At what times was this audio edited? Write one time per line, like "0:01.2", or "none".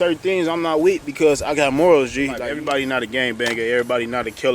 0:02.4